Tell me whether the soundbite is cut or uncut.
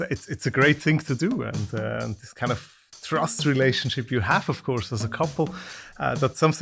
uncut